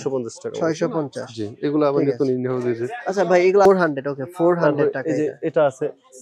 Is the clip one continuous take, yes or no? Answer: no